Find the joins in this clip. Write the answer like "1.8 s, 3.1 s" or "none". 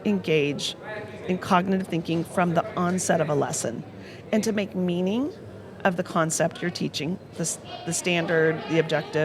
none